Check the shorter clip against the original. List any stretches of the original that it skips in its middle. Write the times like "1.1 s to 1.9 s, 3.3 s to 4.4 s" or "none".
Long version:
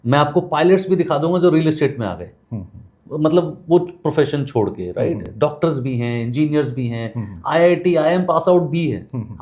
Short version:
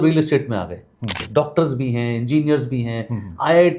2.7 s to 5.3 s